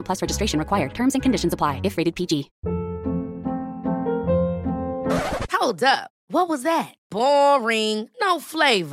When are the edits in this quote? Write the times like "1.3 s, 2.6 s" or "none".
2.5 s

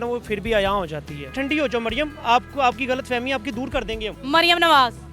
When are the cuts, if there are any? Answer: 1.3 s, 4.1 s

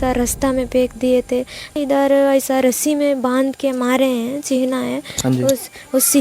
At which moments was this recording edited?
1.8 s

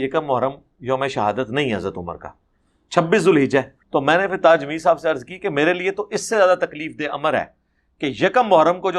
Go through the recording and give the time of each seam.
3.8 s

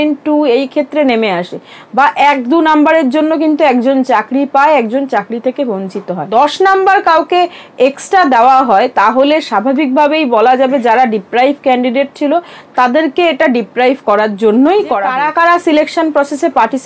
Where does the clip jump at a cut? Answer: 6.2 s, 15.2 s

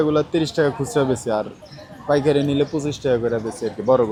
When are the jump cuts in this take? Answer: none

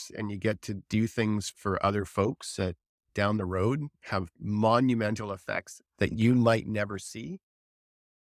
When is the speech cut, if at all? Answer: 1.5 s, 3.1 s

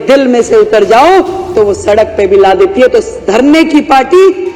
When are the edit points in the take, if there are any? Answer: none

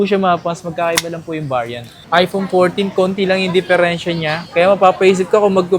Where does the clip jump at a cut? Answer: 2.0 s, 4.4 s

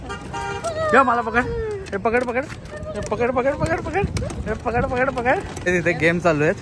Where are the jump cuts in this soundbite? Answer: 5.5 s

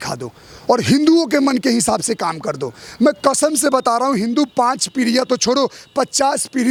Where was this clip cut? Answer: none

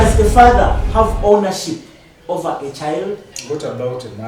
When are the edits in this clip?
3.3 s

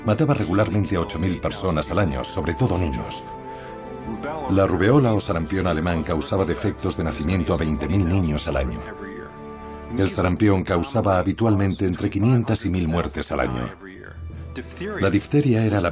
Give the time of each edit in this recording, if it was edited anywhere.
1.4 s

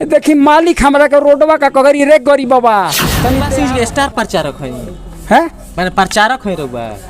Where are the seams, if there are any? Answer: 3.5 s

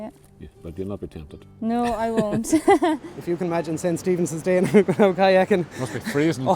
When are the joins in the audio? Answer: 3.0 s

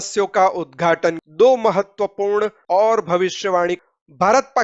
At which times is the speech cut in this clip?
1.2 s, 2.6 s, 3.8 s

